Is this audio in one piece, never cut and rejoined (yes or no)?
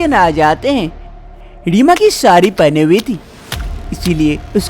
no